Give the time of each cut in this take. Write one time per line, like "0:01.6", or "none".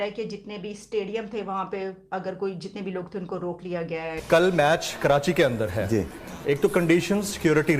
0:04.1